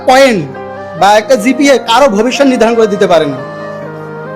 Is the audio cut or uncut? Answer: uncut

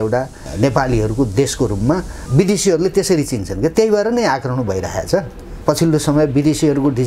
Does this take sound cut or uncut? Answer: cut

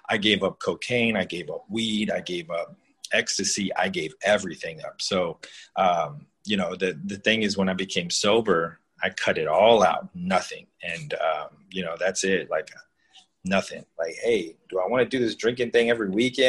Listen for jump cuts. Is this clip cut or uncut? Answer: cut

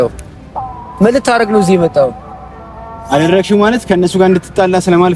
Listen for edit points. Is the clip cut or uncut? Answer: uncut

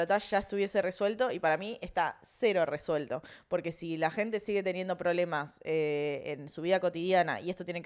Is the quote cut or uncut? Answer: uncut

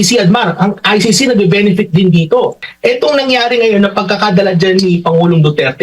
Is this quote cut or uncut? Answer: cut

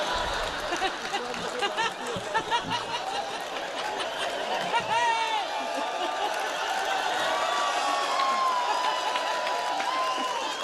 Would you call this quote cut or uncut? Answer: uncut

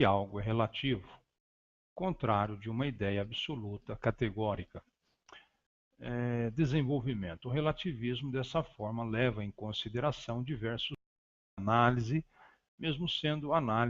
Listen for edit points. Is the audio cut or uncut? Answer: cut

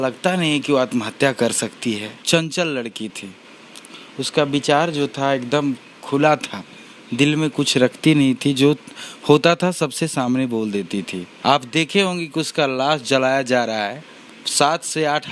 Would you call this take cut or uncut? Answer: cut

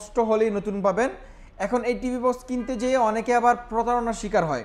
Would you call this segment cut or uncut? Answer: uncut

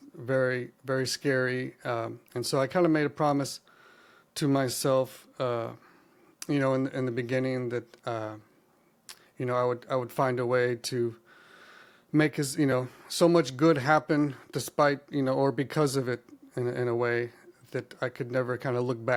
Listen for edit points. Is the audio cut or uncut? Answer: uncut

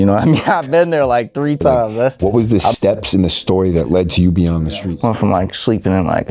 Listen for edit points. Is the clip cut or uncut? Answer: cut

